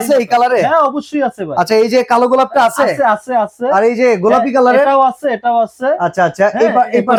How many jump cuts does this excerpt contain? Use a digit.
0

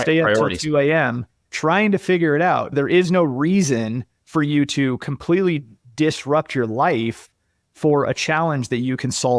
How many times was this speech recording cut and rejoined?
1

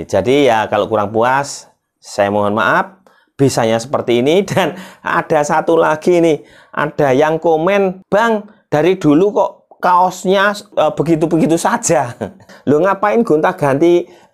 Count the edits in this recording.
3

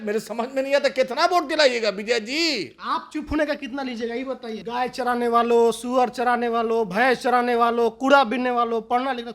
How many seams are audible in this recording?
1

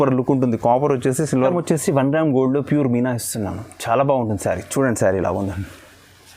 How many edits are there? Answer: 1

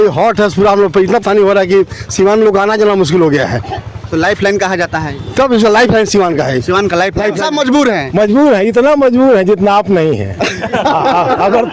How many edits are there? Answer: 2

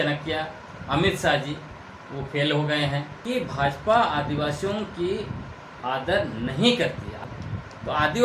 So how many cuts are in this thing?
2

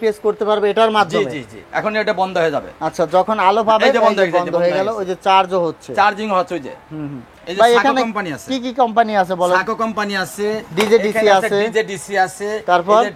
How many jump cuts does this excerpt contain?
2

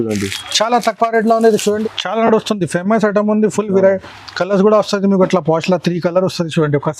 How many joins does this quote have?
1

